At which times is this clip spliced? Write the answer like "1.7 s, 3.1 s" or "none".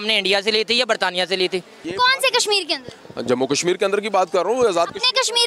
1.8 s